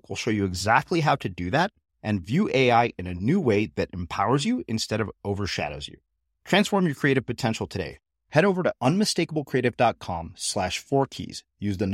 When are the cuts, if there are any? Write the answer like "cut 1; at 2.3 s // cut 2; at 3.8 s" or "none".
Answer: none